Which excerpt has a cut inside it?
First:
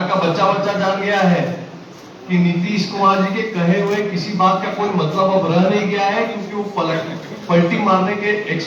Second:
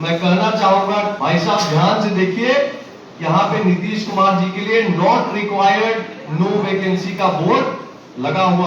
second; 1 cut; at 1.1 s

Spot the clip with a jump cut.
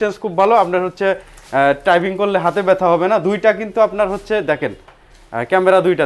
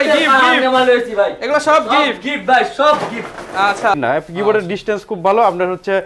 second; 1 cut; at 3.9 s

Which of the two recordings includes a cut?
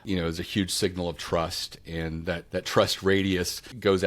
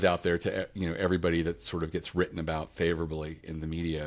first; 1 cut; at 2.4 s

